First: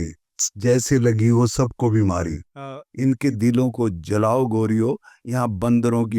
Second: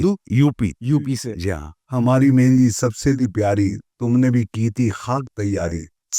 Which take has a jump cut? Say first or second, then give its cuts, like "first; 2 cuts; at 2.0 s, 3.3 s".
second; 1 cut; at 1.7 s